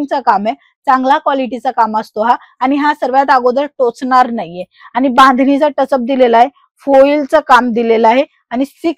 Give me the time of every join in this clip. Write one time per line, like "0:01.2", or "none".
none